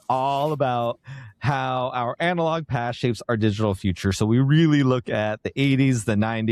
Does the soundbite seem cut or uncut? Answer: uncut